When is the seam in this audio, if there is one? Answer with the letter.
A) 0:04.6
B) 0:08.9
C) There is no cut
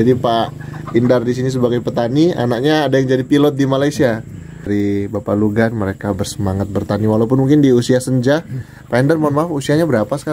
A